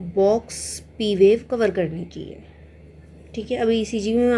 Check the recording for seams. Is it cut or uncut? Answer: uncut